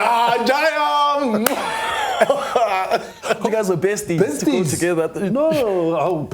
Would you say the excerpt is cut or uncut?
cut